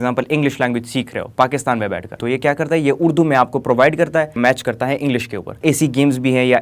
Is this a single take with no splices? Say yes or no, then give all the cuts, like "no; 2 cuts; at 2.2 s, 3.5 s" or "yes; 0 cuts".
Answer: no; 3 cuts; at 2.1 s, 4.4 s, 5.6 s